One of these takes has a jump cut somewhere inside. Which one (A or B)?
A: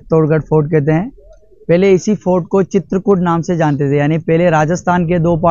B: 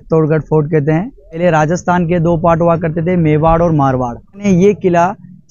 B